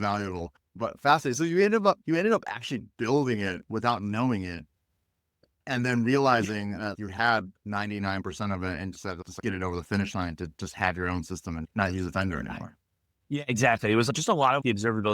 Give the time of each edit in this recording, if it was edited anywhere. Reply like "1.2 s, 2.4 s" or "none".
6.9 s, 14.1 s